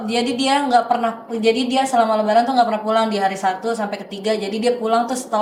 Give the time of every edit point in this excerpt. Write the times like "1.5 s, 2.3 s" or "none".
none